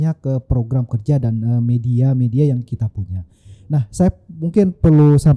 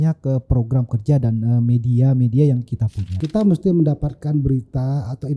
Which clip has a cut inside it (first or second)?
second